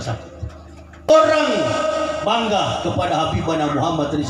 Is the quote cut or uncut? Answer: cut